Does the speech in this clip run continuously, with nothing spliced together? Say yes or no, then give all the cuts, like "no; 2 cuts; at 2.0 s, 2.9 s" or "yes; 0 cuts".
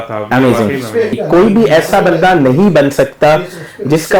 no; 1 cut; at 1.2 s